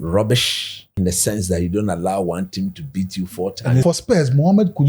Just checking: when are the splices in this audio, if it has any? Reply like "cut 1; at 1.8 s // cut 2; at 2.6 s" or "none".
cut 1; at 0.9 s // cut 2; at 3.8 s